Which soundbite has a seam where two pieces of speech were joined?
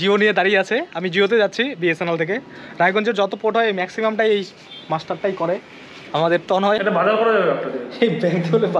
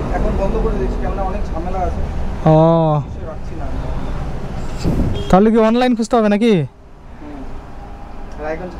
first; 1 cut; at 6.8 s

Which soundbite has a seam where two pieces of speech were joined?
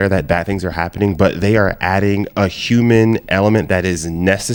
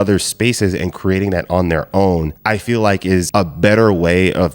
second; 1 cut; at 3.3 s

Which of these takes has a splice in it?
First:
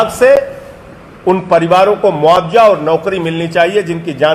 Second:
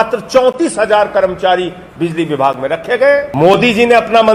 second; 1 cut; at 3.3 s

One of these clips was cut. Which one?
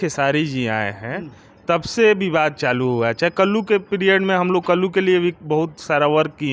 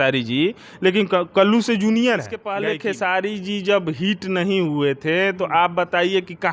second; 1 cut; at 2.6 s

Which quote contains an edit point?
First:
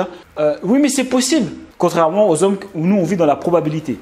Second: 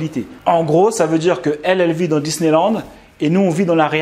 first; 1 cut; at 1.6 s

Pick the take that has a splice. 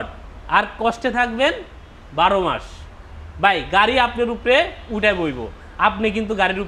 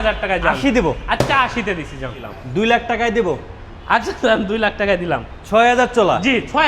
second; 1 cut; at 2.2 s

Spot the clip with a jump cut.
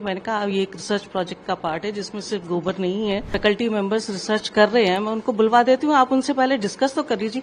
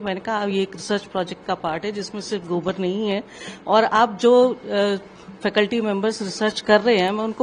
first; 1 cut; at 3.3 s

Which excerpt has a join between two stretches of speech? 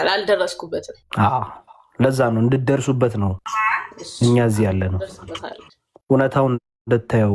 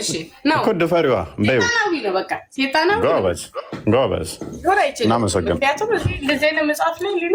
first; 2 cuts; at 1.0 s, 3.4 s

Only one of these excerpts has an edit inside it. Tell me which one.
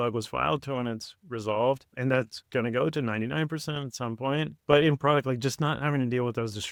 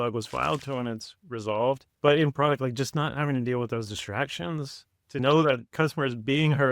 second; 2 cuts; at 1.9 s, 5.2 s

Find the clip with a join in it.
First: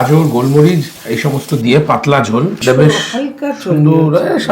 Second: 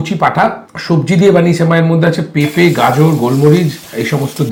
first; 1 cut; at 2.6 s

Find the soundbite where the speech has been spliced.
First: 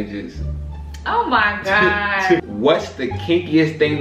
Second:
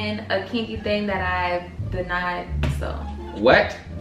first; 1 cut; at 2.5 s

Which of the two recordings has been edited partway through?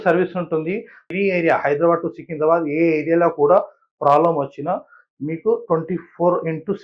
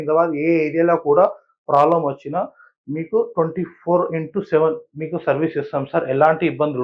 first; 1 cut; at 1.0 s

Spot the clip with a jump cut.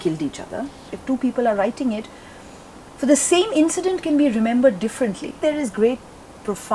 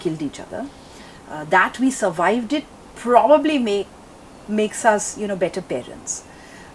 first; 2 cuts; at 0.9 s, 5.3 s

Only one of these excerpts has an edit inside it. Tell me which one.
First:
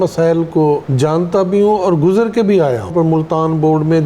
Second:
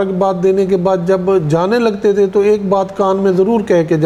first; 2 cuts; at 0.9 s, 2.9 s

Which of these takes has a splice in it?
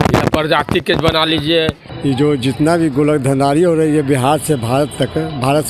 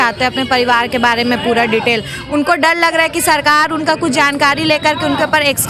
first; 1 cut; at 1.9 s

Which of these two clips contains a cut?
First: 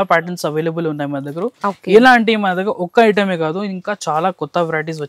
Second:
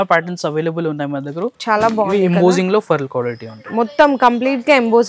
second; 1 cut; at 1.6 s

